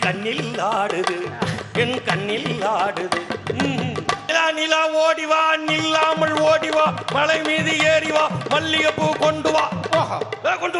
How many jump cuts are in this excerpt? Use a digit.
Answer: 1